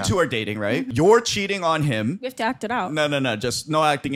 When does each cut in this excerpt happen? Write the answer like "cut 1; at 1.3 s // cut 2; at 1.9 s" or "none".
cut 1; at 0.9 s // cut 2; at 2.2 s